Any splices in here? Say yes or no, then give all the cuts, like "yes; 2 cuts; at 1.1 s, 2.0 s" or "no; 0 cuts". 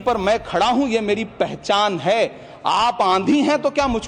no; 0 cuts